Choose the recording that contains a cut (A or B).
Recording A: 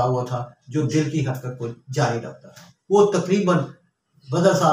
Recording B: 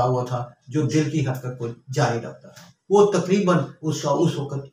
B